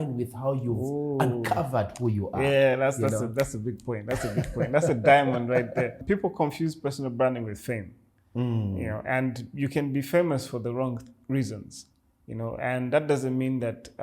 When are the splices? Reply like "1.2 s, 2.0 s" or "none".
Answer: 6.0 s